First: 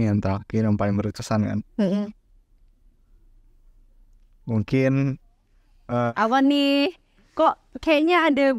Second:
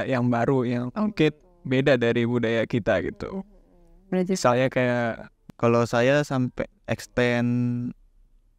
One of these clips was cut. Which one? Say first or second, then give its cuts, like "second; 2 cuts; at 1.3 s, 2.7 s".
second; 1 cut; at 5.4 s